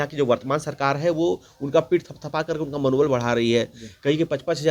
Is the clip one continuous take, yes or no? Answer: yes